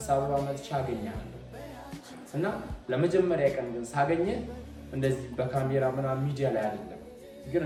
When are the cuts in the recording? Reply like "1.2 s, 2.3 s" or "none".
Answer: none